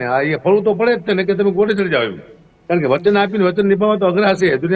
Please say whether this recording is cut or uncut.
uncut